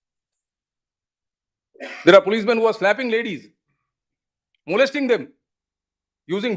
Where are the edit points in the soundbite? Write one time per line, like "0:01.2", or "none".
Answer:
none